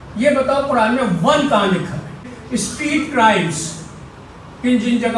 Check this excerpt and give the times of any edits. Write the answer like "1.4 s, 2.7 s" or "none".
2.3 s